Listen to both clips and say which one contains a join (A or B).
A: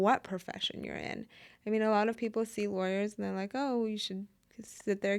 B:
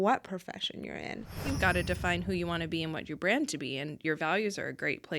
B